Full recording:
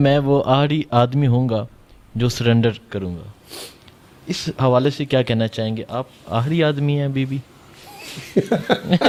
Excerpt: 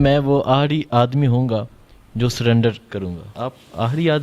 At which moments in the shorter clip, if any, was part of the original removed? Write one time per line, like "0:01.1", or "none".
0:03.3